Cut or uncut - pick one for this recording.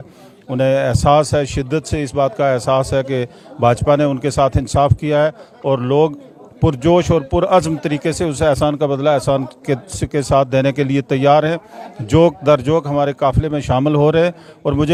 uncut